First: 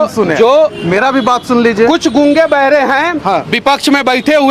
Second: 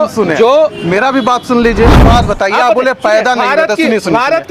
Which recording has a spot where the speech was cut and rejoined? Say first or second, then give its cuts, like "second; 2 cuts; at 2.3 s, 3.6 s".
second; 1 cut; at 2.0 s